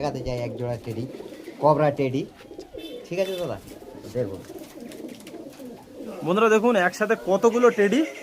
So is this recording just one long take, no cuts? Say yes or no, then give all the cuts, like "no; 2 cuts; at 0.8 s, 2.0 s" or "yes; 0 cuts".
no; 1 cut; at 6.1 s